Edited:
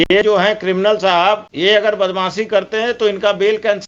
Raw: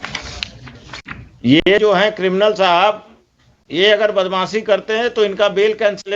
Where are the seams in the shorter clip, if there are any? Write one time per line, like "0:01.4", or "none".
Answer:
0:01.5